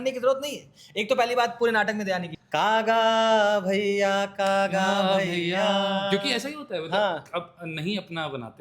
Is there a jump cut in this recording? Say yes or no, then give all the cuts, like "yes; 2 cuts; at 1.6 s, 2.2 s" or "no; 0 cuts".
yes; 1 cut; at 2.4 s